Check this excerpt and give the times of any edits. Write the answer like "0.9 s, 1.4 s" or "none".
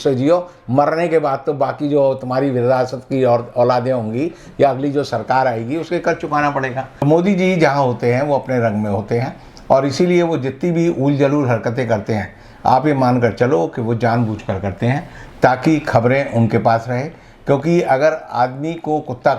7.0 s